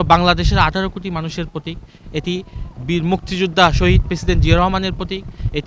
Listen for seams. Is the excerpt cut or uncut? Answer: uncut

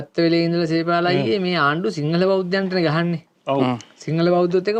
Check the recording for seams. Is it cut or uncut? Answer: uncut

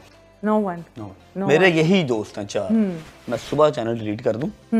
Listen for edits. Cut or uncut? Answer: cut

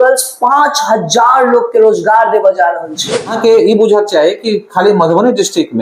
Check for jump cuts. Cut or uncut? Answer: cut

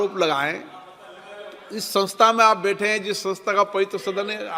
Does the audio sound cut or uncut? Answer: uncut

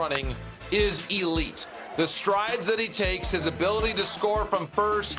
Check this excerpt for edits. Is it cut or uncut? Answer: uncut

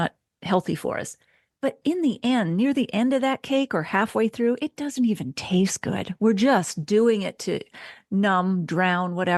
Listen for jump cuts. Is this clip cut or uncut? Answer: uncut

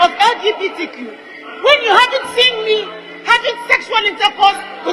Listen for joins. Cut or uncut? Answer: uncut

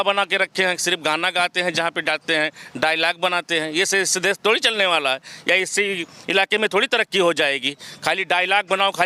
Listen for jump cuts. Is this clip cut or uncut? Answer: uncut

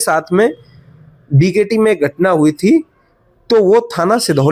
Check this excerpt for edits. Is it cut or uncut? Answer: uncut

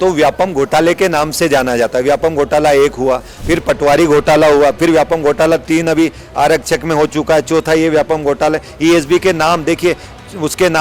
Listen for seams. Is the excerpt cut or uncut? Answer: cut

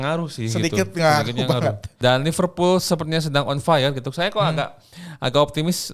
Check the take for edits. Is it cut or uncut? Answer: cut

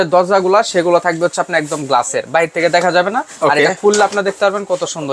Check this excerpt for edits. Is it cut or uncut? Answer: uncut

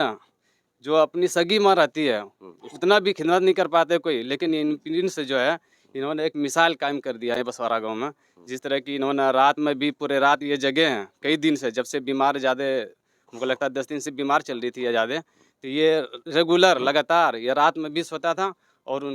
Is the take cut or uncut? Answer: uncut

